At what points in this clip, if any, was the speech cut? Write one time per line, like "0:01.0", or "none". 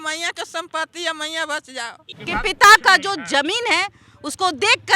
0:02.1